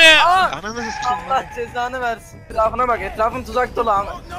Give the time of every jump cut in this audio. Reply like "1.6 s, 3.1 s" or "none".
2.4 s